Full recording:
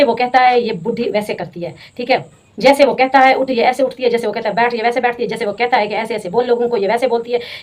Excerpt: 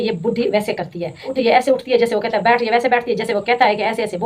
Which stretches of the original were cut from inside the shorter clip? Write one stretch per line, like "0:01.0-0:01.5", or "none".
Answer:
0:01.9-0:03.5